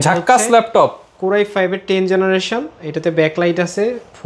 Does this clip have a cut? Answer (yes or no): no